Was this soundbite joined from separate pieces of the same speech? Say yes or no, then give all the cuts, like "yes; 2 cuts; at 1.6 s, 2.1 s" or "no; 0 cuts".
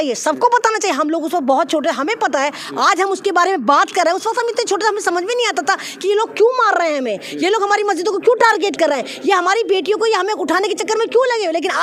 no; 0 cuts